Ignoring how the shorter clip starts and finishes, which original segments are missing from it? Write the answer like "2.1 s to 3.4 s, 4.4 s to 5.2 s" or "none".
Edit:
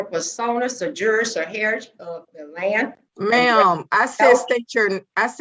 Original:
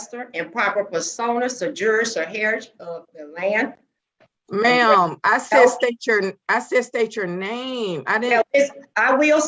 3.8 s to 4.4 s